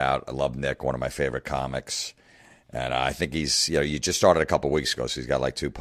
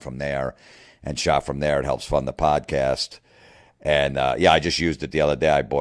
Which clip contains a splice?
second; 1 cut; at 2.6 s

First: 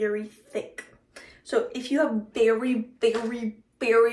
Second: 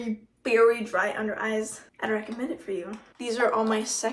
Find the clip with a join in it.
second; 2 cuts; at 1.8 s, 3.0 s

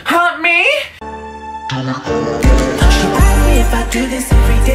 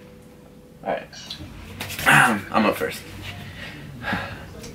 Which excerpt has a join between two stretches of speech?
first; 1 cut; at 1.3 s

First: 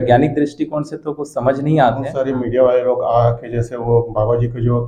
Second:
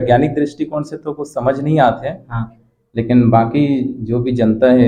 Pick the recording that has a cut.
first; 1 cut; at 2.2 s

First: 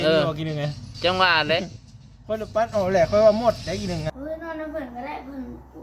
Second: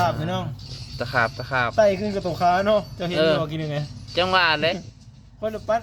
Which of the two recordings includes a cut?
first; 1 cut; at 4.1 s

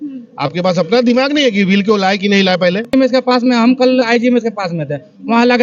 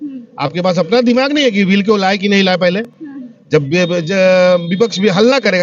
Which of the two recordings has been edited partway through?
first; 1 cut; at 2.9 s

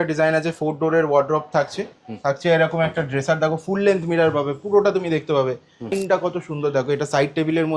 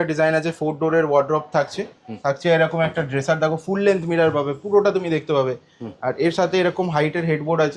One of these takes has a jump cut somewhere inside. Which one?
first; 1 cut; at 5.9 s

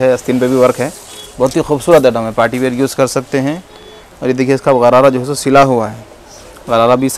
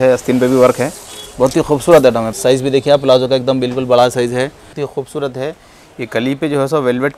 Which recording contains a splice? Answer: second; 2 cuts; at 2.3 s, 4.7 s

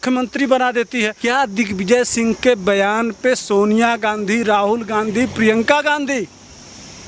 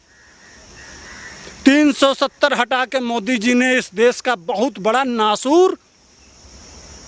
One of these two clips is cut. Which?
first; 1 cut; at 1.2 s

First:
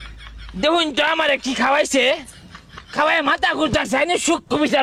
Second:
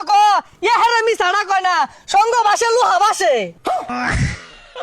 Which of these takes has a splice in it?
second; 1 cut; at 3.9 s

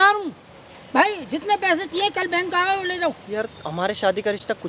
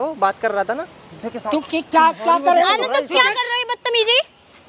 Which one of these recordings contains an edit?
second; 1 cut; at 1.1 s

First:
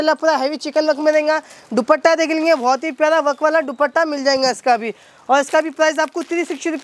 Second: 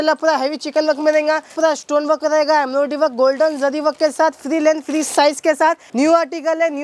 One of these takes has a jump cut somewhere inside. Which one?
second; 2 cuts; at 1.5 s, 5.8 s

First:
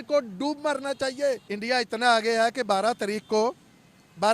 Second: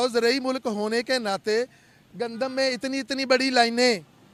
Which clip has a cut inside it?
first; 1 cut; at 1.4 s

